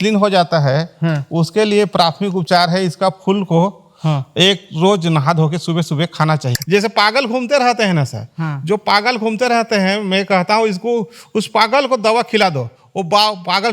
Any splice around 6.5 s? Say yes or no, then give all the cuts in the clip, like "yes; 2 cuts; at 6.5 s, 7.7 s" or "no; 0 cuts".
yes; 1 cut; at 6.5 s